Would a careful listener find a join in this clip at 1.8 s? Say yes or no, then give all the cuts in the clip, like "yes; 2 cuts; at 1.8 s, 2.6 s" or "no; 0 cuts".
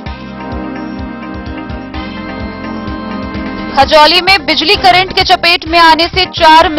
yes; 1 cut; at 1.8 s